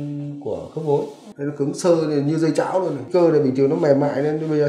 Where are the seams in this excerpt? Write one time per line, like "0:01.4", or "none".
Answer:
0:01.2
0:03.0